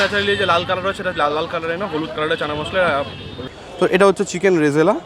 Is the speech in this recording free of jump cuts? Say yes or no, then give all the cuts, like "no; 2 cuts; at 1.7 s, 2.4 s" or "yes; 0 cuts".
no; 1 cut; at 3.4 s